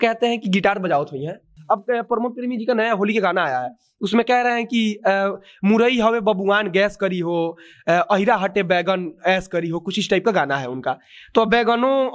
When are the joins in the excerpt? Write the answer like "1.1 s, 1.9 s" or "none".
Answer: 1.5 s